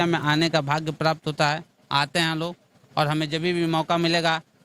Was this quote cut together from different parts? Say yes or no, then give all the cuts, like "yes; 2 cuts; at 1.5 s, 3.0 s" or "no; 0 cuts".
no; 0 cuts